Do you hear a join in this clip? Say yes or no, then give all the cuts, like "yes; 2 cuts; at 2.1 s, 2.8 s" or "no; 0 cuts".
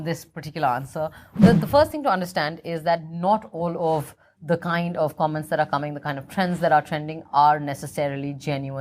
yes; 1 cut; at 1.4 s